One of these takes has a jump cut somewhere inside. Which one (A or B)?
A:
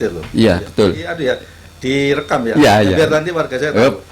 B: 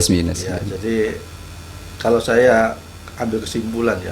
A